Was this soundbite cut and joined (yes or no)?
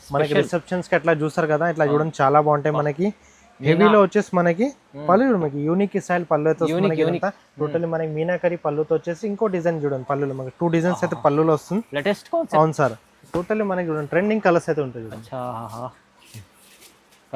yes